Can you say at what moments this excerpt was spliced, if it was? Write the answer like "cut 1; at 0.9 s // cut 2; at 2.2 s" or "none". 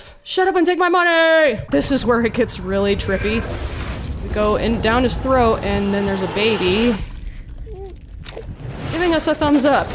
cut 1; at 1.6 s

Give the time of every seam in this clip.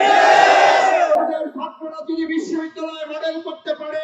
cut 1; at 1.2 s

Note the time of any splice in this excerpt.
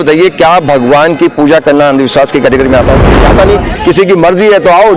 cut 1; at 3.3 s

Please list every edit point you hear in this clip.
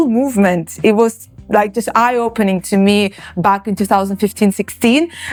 none

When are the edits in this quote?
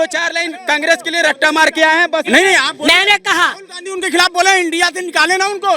cut 1; at 2.3 s

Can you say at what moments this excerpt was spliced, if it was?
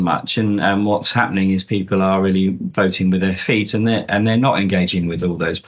none

